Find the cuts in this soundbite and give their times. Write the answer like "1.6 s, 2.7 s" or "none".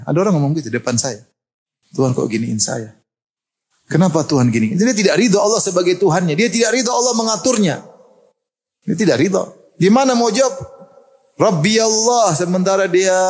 none